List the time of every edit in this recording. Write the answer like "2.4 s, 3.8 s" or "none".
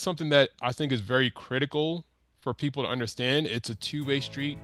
none